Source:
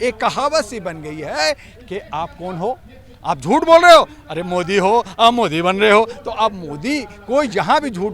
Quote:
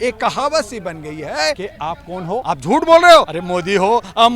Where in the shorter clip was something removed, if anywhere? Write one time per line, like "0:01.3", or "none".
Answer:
0:01.9
0:03.4